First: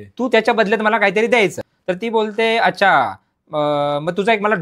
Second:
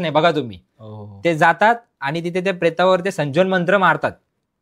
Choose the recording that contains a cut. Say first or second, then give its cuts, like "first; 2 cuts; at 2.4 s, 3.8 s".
first; 1 cut; at 1.7 s